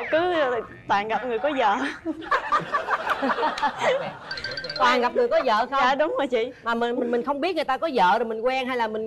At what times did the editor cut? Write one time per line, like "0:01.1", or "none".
none